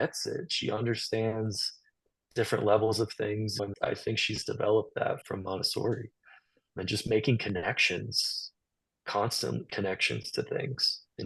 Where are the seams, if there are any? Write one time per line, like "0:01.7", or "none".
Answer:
0:03.7
0:05.2
0:06.7

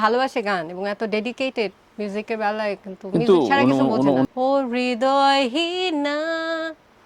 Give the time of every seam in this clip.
0:01.8
0:04.2

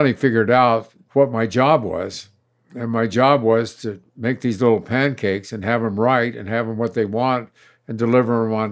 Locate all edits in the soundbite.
0:01.0

